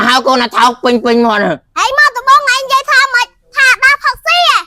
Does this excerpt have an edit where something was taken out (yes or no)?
no